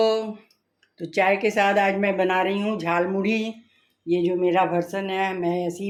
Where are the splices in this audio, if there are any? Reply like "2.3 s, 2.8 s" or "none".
none